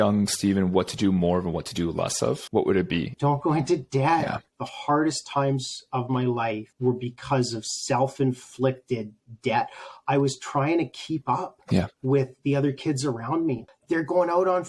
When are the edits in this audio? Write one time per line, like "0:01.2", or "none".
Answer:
0:03.1
0:04.4
0:06.7
0:13.7